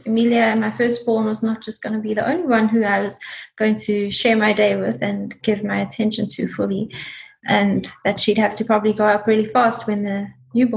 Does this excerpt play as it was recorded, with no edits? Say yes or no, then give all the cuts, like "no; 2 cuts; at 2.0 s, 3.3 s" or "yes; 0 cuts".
yes; 0 cuts